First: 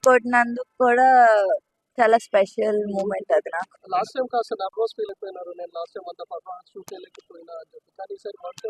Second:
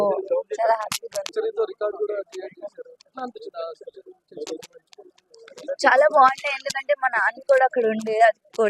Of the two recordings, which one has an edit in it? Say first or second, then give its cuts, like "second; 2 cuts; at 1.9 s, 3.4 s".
second; 1 cut; at 1.3 s